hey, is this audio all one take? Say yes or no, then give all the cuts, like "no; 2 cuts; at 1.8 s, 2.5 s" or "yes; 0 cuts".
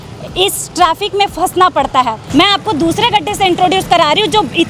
no; 1 cut; at 2.2 s